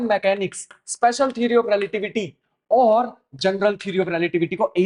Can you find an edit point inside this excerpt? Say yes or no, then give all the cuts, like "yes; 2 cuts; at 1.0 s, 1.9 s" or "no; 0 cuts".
no; 0 cuts